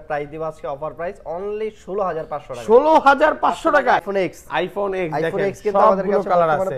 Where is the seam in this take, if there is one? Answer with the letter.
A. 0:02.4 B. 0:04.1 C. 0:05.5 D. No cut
B